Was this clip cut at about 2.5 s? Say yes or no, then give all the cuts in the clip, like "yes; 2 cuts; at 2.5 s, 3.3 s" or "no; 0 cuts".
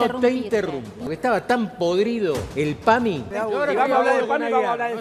yes; 3 cuts; at 1.0 s, 2.5 s, 3.3 s